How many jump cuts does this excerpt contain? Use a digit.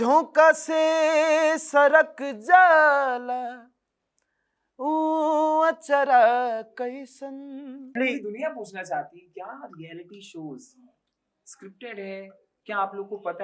1